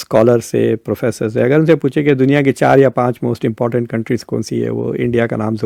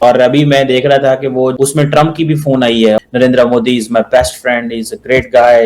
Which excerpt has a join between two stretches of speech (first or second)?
second